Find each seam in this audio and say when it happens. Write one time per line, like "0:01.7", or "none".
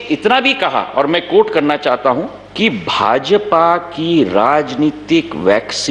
0:02.4